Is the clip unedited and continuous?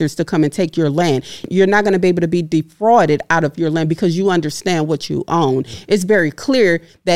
no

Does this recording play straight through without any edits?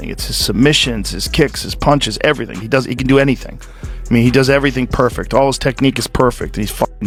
yes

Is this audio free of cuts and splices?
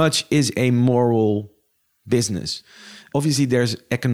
no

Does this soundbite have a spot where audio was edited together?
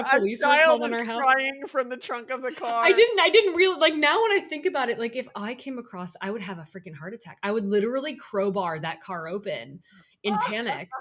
no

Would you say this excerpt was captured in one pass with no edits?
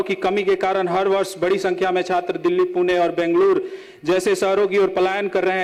yes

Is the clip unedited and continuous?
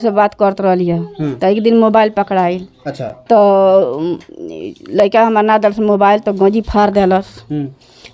yes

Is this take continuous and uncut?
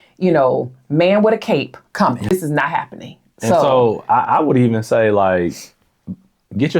no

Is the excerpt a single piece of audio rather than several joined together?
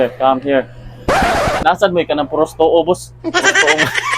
no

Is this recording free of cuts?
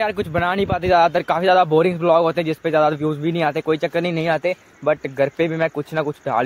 yes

